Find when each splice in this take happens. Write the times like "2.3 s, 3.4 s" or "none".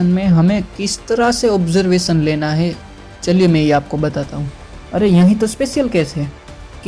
none

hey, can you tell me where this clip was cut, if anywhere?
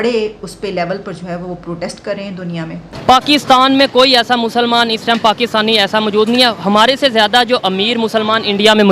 3.0 s

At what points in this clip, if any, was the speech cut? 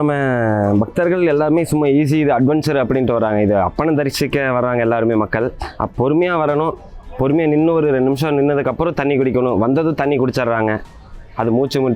none

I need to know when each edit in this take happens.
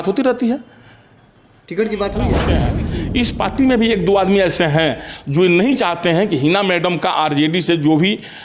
2.5 s

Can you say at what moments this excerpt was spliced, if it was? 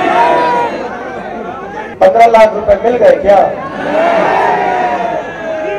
1.9 s

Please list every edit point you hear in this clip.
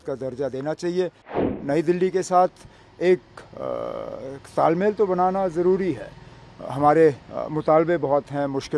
1.4 s

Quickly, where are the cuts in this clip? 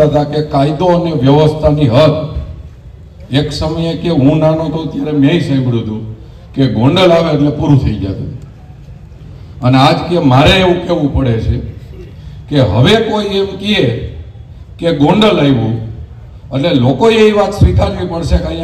none

